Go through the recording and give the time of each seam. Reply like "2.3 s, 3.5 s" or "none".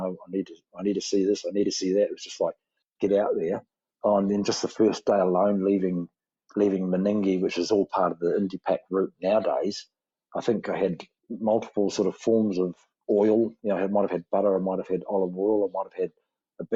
none